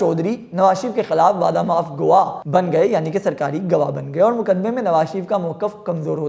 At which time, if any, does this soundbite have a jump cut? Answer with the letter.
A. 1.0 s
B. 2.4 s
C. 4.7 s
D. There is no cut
B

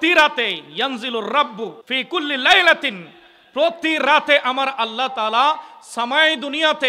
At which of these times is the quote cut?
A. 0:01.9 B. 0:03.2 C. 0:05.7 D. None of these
A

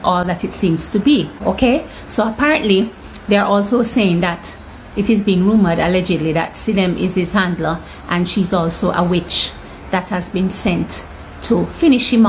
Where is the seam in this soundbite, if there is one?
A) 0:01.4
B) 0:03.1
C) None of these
A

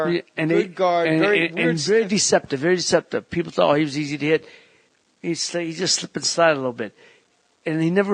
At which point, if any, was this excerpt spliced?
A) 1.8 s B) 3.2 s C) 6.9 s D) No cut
B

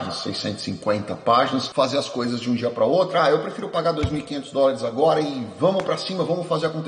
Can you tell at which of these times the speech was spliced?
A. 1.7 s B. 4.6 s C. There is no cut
A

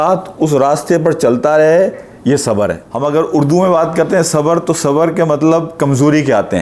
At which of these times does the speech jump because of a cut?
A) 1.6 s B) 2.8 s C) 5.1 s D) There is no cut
B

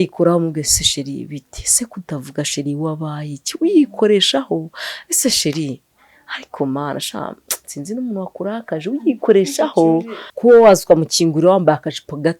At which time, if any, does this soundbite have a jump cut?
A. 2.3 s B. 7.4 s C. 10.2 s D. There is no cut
C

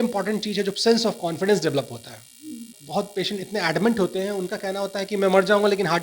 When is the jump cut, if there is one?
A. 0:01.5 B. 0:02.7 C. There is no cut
B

